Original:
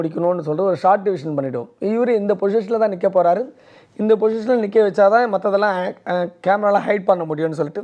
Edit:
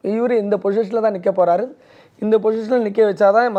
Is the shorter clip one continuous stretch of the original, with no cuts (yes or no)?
yes